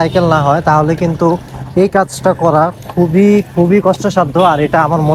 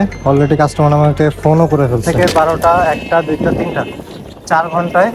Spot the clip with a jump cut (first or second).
second